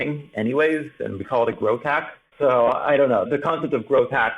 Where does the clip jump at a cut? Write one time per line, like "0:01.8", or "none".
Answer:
0:02.2
0:03.3